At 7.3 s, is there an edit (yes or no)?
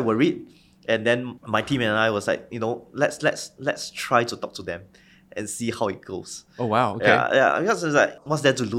no